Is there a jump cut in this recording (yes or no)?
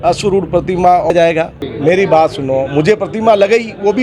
yes